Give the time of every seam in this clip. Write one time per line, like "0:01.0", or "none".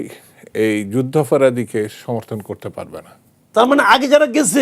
0:03.4